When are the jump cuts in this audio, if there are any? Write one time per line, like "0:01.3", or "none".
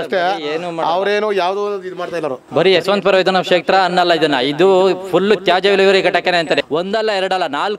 0:06.6